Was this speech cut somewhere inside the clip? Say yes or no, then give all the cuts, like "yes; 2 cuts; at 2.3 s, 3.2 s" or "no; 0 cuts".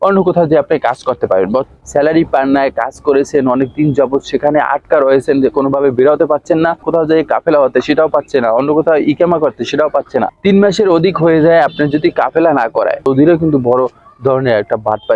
yes; 4 cuts; at 1.7 s, 6.8 s, 10.3 s, 13.1 s